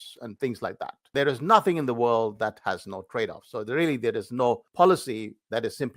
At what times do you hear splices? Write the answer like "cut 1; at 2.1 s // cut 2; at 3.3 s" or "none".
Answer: cut 1; at 1.1 s // cut 2; at 4.7 s